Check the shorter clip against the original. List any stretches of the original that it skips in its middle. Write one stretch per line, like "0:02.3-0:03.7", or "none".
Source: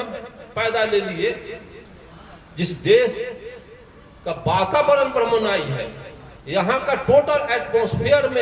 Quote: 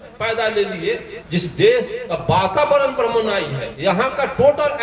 0:01.5-0:02.4
0:03.2-0:04.2
0:05.8-0:06.3